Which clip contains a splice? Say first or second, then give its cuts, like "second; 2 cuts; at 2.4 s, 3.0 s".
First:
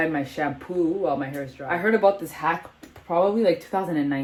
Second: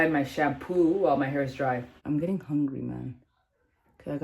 second; 1 cut; at 1.7 s